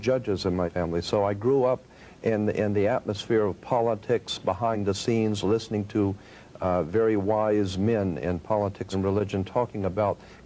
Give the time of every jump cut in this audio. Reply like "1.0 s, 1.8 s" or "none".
none